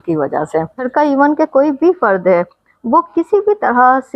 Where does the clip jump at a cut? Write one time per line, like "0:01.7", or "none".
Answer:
0:01.2